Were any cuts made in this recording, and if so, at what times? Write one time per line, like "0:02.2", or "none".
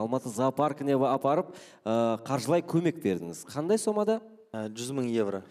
0:04.4